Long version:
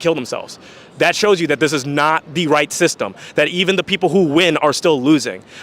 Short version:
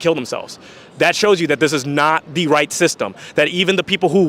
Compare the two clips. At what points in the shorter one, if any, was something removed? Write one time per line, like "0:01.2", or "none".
none